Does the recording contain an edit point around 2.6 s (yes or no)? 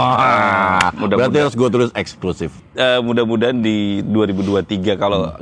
yes